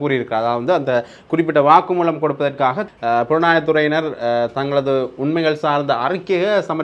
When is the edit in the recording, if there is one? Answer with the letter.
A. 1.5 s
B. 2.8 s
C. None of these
B